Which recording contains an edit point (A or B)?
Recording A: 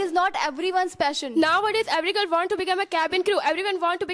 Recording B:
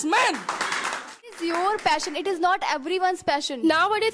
B